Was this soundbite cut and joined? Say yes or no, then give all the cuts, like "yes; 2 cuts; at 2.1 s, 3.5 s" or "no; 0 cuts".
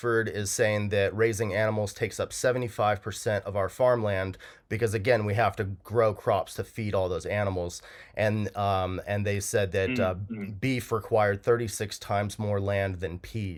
no; 0 cuts